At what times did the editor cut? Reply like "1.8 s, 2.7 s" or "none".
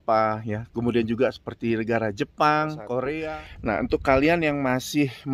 3.2 s